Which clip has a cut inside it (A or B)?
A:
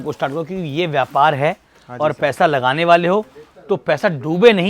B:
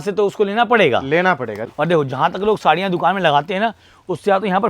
B